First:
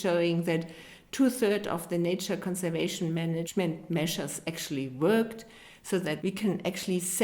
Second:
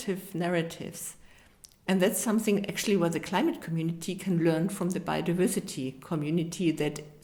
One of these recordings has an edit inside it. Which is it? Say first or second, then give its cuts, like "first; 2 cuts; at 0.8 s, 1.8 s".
first; 2 cuts; at 3.5 s, 5.8 s